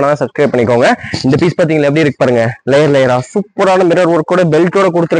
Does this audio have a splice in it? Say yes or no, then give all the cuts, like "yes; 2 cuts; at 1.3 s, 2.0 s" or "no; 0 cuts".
no; 0 cuts